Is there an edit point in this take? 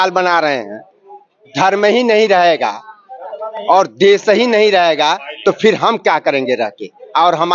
yes; 1 cut; at 1.5 s

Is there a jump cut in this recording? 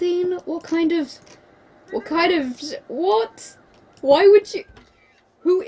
no; 0 cuts

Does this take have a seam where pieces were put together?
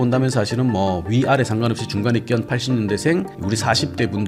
no; 0 cuts

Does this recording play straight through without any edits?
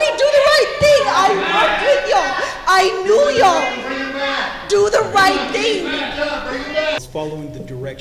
no; 1 cut; at 7.0 s

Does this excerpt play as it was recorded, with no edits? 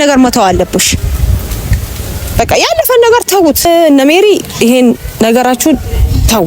no; 1 cut; at 3.7 s

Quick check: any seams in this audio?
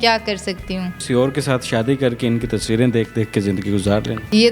no; 0 cuts

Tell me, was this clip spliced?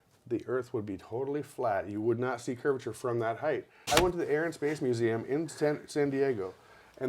yes; 1 cut; at 3.8 s

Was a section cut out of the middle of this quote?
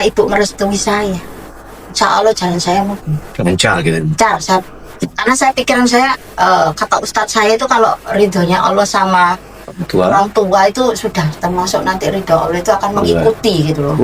no; 0 cuts

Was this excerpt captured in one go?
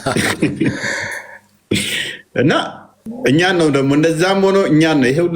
no; 1 cut; at 3.0 s

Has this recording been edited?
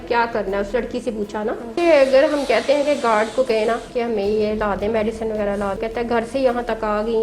yes; 2 cuts; at 1.8 s, 5.8 s

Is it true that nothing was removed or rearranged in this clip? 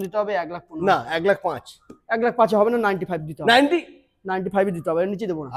yes; 0 cuts

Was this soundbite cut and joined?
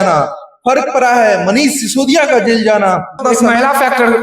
yes; 1 cut; at 3.2 s

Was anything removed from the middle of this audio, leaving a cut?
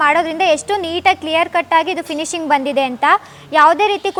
no; 0 cuts

